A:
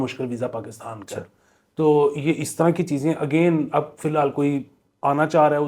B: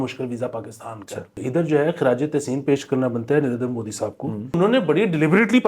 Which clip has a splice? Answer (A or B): B